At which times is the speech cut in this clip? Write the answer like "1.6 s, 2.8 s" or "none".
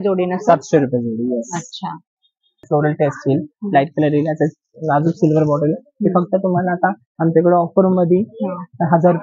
2.7 s